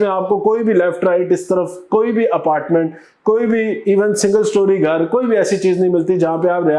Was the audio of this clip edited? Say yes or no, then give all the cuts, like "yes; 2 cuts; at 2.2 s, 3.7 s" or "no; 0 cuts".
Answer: no; 0 cuts